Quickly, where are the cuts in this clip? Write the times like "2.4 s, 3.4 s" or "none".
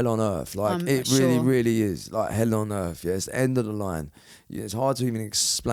none